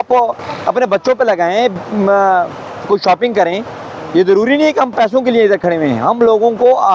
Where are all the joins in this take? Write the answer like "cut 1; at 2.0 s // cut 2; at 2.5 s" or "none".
none